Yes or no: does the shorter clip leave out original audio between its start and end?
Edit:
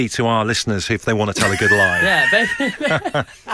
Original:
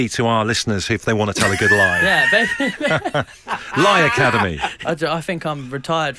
no